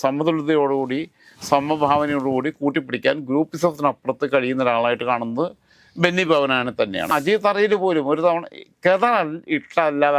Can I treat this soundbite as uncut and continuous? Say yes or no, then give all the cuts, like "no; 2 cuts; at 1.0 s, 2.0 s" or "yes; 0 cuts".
no; 1 cut; at 7.1 s